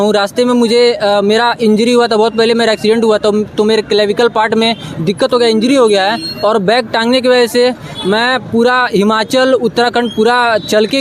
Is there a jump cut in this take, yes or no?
no